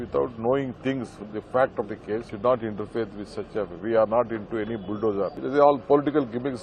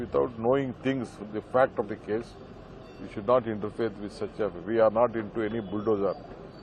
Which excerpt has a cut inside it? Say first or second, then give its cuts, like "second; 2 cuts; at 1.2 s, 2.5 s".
first; 2 cuts; at 2.3 s, 5.4 s